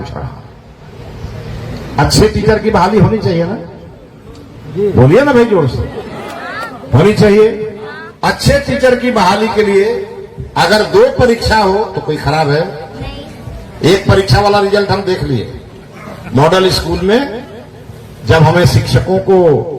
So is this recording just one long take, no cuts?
no; 1 cut; at 14.0 s

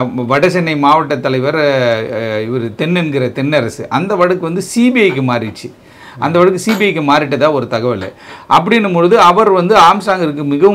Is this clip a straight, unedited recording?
yes; 0 cuts

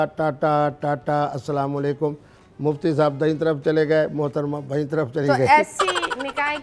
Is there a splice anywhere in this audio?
no; 0 cuts

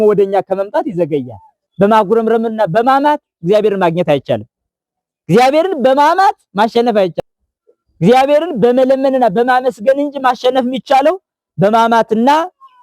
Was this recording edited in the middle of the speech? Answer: yes; 2 cuts; at 1.6 s, 7.1 s

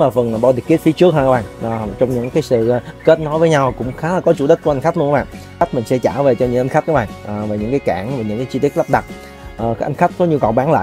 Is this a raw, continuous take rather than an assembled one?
no; 1 cut; at 5.6 s

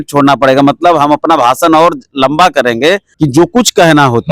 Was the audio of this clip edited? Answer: yes; 1 cut; at 3.1 s

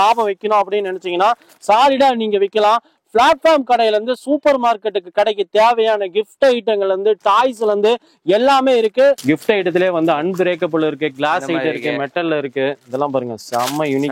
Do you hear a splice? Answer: yes; 1 cut; at 9.2 s

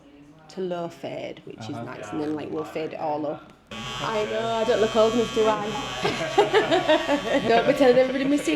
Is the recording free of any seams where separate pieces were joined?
no; 1 cut; at 3.8 s

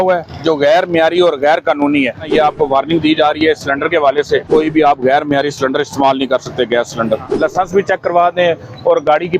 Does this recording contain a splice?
yes; 3 cuts; at 2.3 s, 4.5 s, 7.3 s

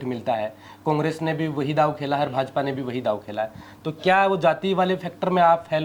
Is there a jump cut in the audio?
no; 0 cuts

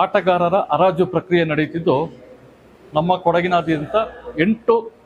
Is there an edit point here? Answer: no; 0 cuts

